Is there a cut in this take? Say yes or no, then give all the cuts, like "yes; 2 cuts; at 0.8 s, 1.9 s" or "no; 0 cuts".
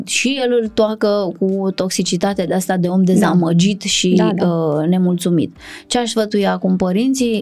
no; 0 cuts